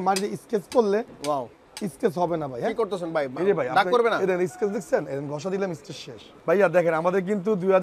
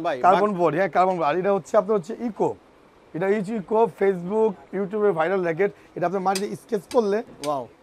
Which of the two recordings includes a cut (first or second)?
first